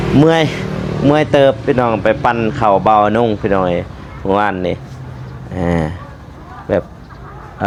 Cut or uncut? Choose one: uncut